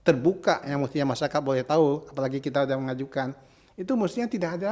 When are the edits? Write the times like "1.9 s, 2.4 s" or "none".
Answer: none